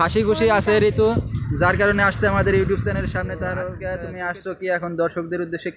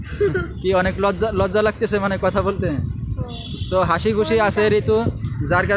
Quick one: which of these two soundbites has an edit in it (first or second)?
first